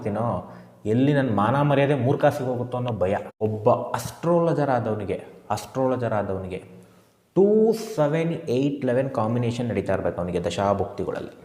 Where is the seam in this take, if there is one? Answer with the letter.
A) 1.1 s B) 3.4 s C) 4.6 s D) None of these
B